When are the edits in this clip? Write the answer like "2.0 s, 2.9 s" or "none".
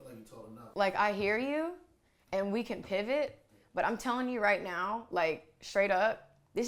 none